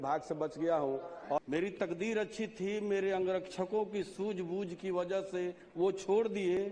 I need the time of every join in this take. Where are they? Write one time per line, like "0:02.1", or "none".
0:01.4